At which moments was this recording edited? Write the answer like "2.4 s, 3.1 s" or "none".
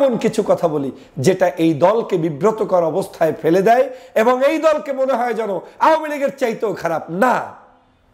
none